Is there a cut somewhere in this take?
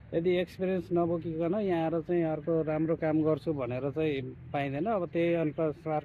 no; 0 cuts

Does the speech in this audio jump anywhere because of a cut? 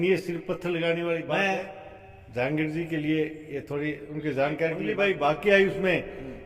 yes; 2 cuts; at 1.5 s, 4.9 s

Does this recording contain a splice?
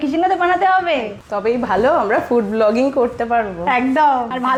no; 0 cuts

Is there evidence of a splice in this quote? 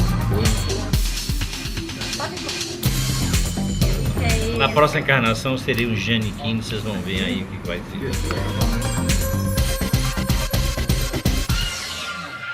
yes; 1 cut; at 6.5 s

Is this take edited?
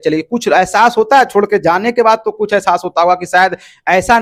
no; 0 cuts

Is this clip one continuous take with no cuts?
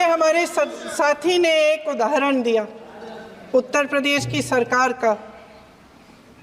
yes; 0 cuts

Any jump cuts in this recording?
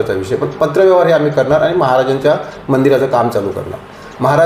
no; 0 cuts

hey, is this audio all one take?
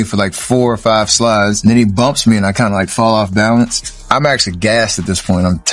no; 2 cuts; at 1.6 s, 4.1 s

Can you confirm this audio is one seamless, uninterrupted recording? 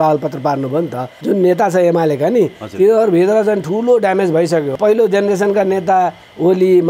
no; 2 cuts; at 1.1 s, 4.7 s

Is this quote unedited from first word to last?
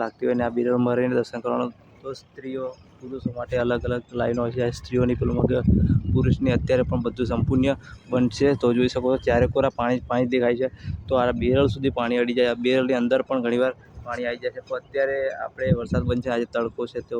yes; 0 cuts

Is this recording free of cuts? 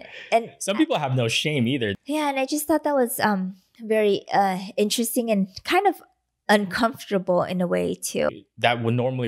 no; 2 cuts; at 1.9 s, 8.3 s

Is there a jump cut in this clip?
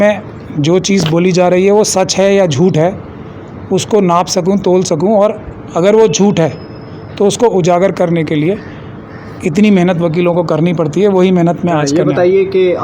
no; 0 cuts

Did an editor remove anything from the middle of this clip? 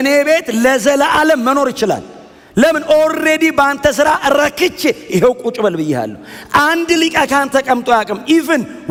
no; 0 cuts

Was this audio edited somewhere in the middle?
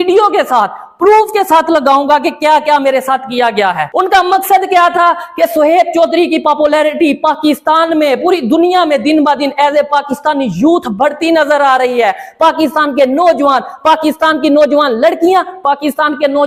yes; 1 cut; at 3.8 s

